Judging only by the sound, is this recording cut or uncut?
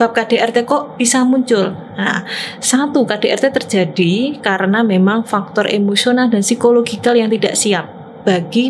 uncut